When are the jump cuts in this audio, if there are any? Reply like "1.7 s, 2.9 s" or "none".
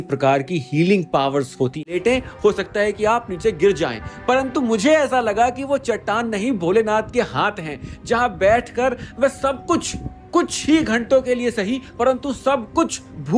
1.9 s